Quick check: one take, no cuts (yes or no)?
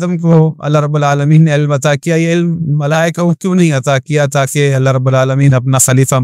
yes